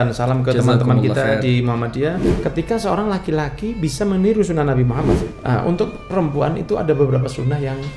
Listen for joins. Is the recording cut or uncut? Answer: cut